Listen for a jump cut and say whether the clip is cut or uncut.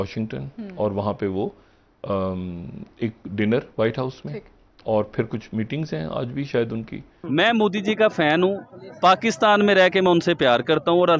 cut